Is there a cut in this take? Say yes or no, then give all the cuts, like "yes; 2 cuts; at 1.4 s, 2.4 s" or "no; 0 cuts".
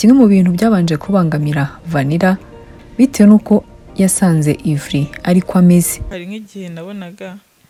no; 0 cuts